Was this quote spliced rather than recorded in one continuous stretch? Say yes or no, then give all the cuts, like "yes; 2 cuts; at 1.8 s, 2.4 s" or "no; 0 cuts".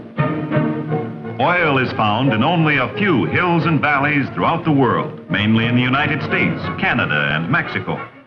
no; 0 cuts